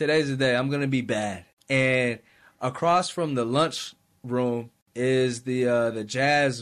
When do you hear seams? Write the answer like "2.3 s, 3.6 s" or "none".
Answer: 1.5 s, 4.8 s